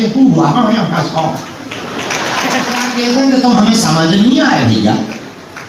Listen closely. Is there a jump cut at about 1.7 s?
no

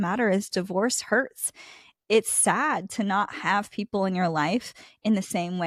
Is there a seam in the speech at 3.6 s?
no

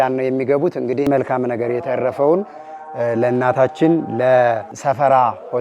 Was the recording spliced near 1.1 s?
yes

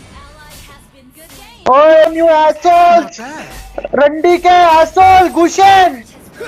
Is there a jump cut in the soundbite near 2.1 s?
yes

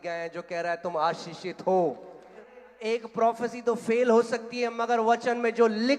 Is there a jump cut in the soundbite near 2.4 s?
yes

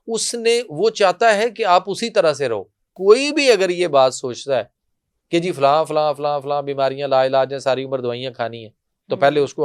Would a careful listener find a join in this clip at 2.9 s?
yes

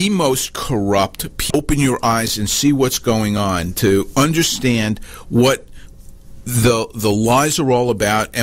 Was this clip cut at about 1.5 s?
yes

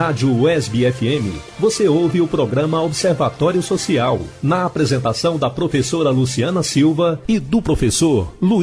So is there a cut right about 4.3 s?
yes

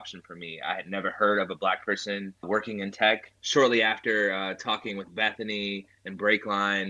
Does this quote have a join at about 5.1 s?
no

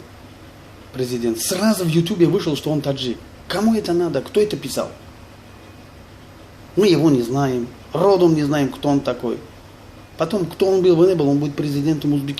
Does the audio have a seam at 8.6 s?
no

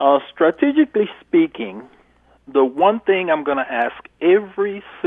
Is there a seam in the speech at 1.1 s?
no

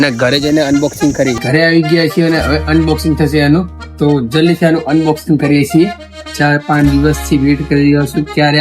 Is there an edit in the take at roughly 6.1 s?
yes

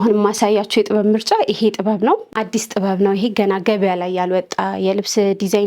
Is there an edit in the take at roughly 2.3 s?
yes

